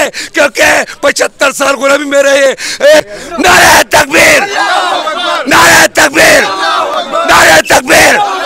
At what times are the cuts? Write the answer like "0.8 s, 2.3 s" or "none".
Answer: 2.7 s